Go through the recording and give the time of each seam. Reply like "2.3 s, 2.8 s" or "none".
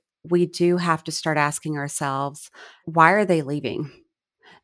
2.8 s